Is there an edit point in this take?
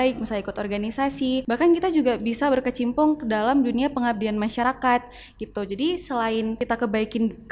yes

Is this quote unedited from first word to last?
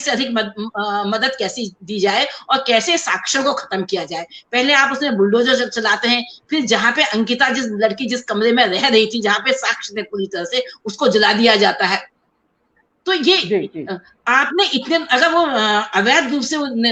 yes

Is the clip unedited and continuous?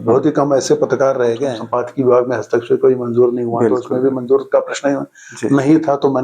no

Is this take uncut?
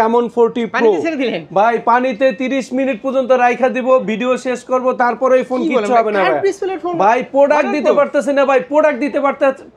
yes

